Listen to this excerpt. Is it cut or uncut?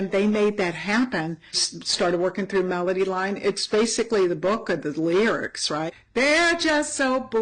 cut